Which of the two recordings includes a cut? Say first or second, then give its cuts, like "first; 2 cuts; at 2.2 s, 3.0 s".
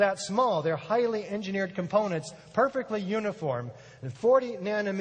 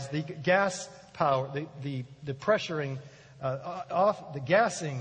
first; 1 cut; at 1.7 s